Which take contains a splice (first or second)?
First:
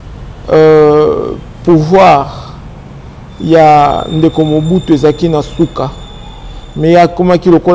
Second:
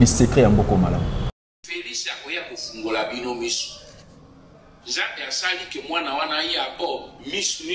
second